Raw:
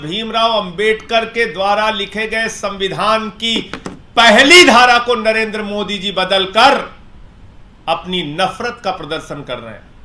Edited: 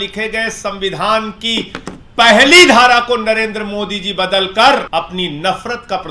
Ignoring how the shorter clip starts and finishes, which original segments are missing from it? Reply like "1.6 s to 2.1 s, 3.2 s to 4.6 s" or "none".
6.9 s to 7.8 s